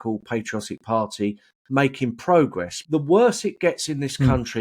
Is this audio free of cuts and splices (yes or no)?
no